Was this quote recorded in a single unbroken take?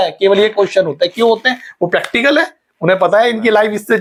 yes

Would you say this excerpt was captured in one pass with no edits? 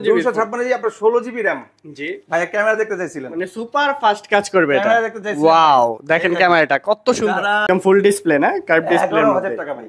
no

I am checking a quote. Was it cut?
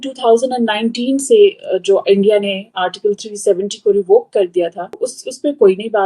yes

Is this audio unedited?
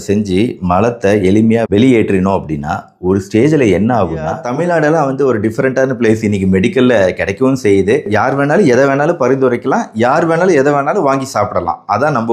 no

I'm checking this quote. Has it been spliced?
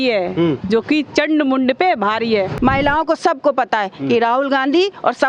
yes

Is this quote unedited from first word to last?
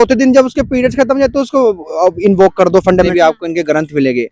no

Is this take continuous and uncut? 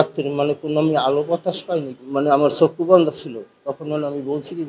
no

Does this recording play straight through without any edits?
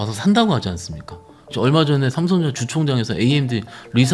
no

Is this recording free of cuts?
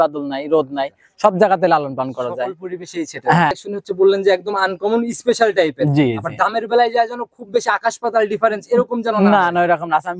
no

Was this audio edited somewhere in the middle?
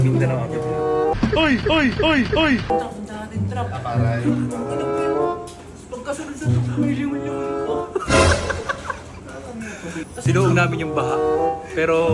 no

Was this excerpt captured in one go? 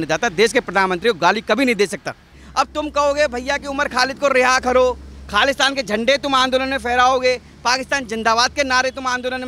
no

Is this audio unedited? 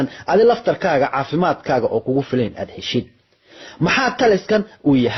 yes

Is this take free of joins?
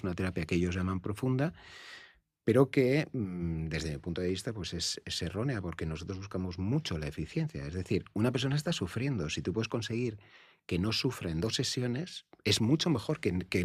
yes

